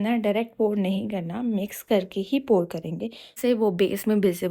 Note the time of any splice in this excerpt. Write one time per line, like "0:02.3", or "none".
0:03.3